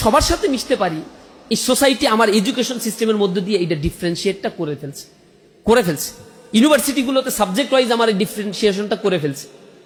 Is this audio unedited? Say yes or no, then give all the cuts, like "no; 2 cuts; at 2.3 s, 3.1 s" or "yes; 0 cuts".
yes; 0 cuts